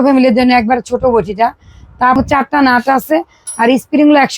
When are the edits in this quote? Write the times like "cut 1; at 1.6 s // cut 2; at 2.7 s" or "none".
cut 1; at 2.2 s